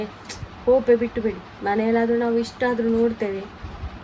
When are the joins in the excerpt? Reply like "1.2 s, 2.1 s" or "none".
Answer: none